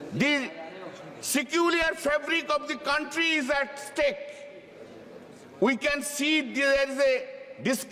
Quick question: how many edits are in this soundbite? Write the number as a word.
zero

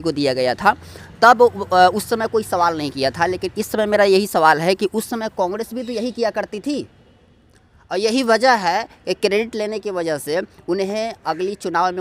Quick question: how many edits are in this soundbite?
zero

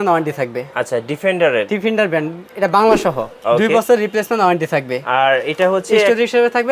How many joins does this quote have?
one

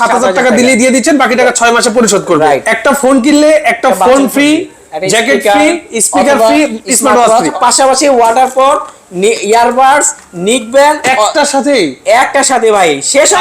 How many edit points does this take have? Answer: two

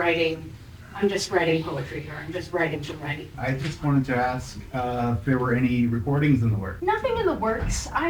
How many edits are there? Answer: two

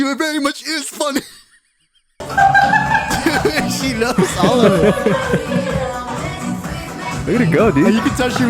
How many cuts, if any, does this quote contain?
one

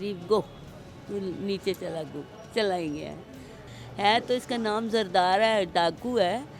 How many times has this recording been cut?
one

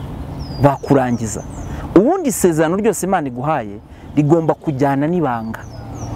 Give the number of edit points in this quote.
zero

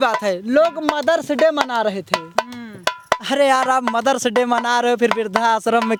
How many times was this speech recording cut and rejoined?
zero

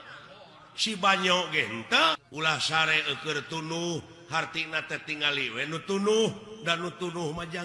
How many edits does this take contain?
one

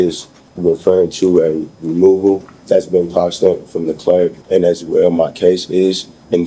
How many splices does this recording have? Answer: two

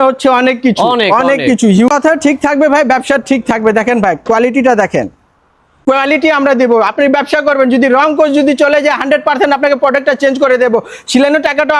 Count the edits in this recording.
two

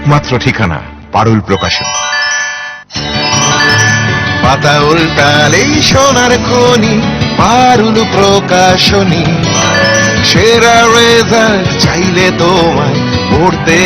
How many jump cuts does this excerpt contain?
two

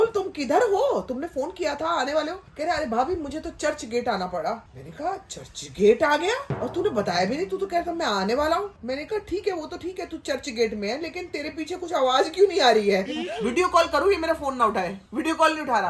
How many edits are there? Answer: four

